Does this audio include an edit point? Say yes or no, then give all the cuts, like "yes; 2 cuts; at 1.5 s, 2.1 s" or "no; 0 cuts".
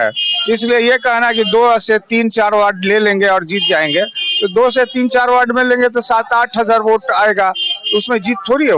no; 0 cuts